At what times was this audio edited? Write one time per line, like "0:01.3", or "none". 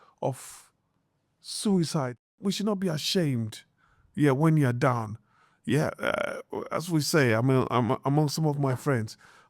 0:02.3